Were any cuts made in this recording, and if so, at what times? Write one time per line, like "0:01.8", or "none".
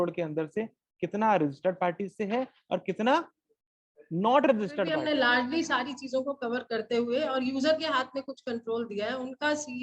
0:05.0